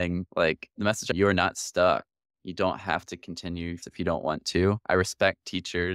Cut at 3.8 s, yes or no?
yes